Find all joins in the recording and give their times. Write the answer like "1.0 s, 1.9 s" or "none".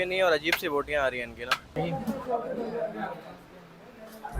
1.8 s

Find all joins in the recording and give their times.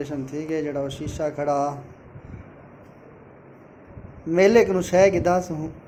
none

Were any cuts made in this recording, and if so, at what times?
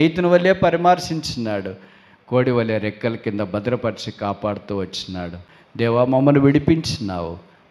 5.4 s

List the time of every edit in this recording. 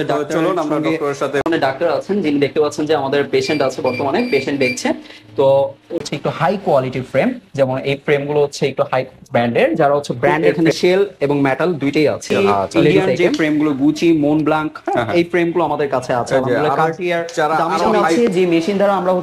1.4 s, 6.0 s, 10.5 s, 12.9 s, 18.0 s

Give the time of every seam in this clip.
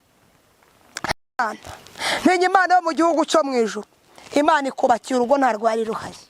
1.1 s

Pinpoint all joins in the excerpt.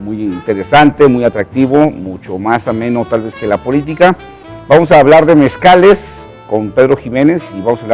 none

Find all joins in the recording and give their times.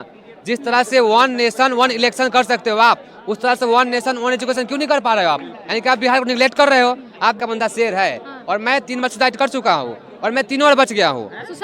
7.4 s

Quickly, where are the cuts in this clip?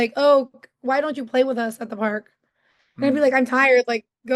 none

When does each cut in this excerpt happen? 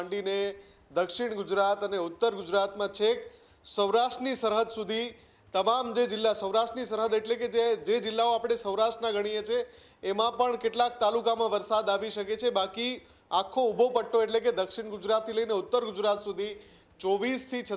none

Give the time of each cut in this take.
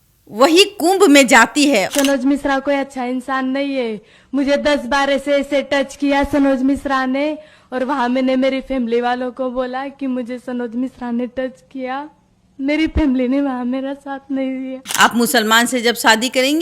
1.9 s, 14.8 s

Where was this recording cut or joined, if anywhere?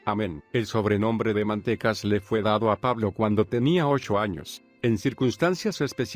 none

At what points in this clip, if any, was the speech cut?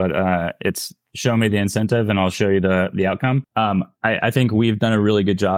3.5 s

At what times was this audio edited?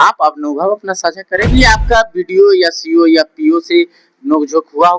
1.5 s

